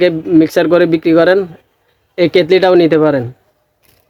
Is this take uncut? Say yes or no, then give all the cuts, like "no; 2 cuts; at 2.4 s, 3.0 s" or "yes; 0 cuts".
yes; 0 cuts